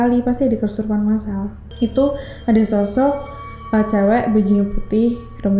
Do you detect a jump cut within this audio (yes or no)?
yes